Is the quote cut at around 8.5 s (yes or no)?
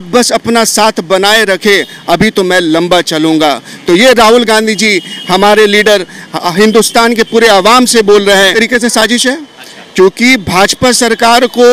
yes